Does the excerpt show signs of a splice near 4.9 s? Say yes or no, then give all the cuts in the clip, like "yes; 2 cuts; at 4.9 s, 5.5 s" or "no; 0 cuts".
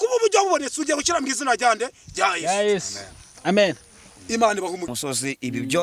yes; 1 cut; at 4.9 s